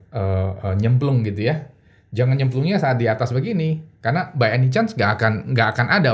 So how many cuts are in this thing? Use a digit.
0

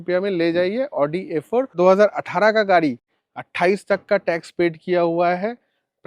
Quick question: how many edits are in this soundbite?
1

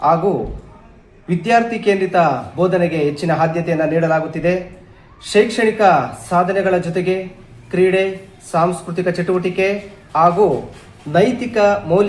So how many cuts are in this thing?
0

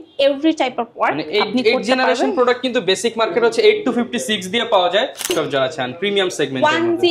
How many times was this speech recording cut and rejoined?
1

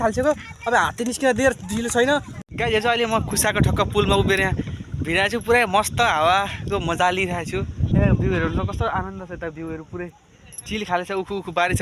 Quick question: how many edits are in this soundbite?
2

